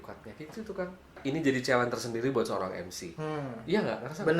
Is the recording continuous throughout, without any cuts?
no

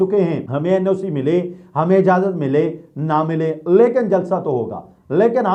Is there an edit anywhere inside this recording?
no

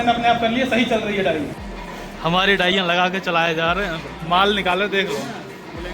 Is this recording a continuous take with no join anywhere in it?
no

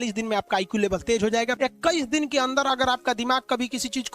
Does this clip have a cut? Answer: yes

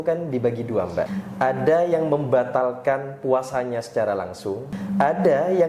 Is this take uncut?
no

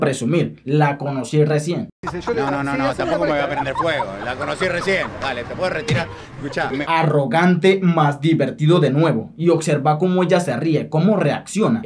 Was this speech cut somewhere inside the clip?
yes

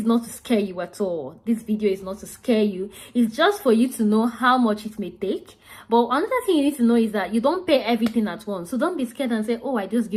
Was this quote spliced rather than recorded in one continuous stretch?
no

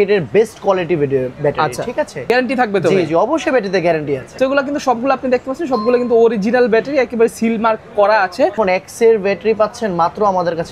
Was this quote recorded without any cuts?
no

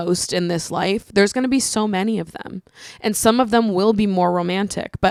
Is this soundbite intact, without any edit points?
yes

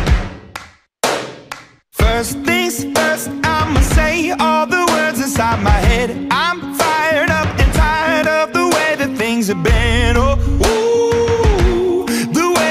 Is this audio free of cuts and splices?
no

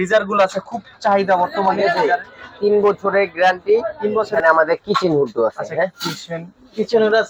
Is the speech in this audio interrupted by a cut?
yes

